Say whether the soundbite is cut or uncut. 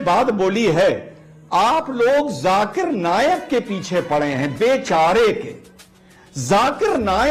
uncut